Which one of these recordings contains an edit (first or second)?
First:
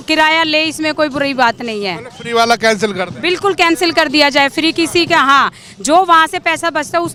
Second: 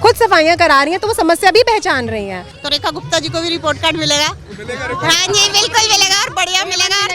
second